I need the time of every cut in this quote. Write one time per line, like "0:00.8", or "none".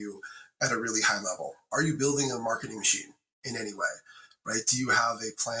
0:01.7

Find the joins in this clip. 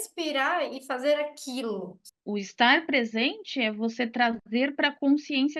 0:02.0

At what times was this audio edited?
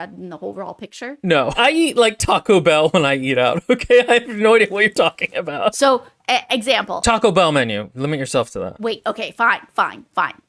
0:01.6
0:05.8
0:08.8

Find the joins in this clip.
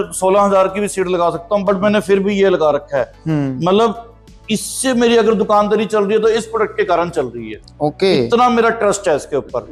none

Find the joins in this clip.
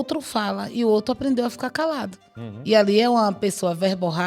none

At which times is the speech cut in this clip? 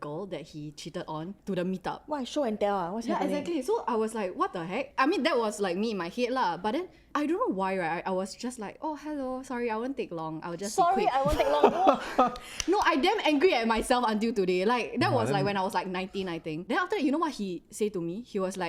none

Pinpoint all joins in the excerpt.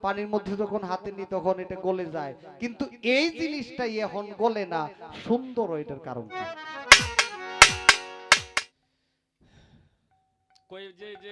0:08.5

